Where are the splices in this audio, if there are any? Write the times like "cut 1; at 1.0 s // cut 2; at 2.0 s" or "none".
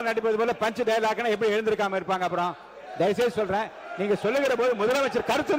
none